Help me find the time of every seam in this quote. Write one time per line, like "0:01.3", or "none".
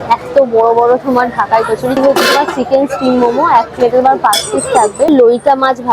0:02.0
0:05.1

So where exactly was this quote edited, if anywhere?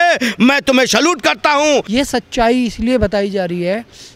0:01.9

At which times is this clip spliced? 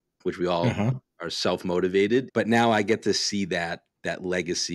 0:02.3

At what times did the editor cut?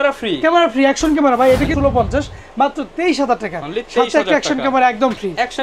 0:01.7

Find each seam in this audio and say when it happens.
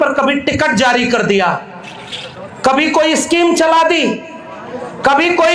none

